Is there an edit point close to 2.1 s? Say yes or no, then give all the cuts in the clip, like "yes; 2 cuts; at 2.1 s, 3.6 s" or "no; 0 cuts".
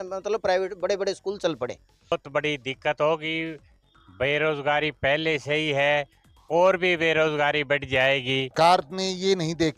yes; 2 cuts; at 2.1 s, 8.5 s